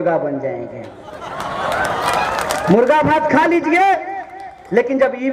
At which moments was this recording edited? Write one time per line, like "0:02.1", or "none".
none